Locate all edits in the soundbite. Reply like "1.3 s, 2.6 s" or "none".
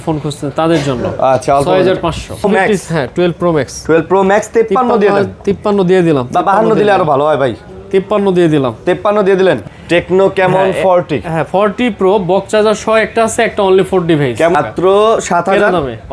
2.4 s, 9.7 s, 14.5 s